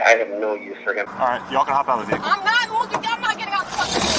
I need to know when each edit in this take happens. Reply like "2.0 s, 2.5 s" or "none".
1.1 s

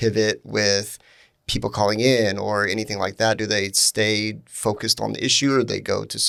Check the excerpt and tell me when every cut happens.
none

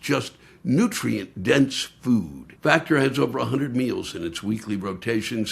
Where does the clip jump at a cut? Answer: 2.4 s

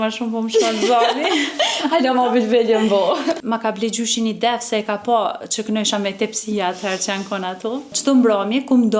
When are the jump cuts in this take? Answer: 3.4 s, 7.9 s

